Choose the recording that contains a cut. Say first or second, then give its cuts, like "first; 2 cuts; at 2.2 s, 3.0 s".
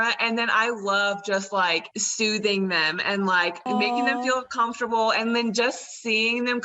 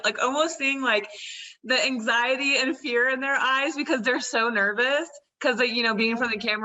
first; 2 cuts; at 2.0 s, 3.7 s